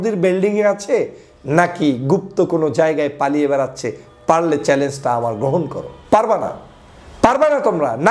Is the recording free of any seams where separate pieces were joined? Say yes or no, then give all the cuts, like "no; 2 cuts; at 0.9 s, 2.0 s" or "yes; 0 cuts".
yes; 0 cuts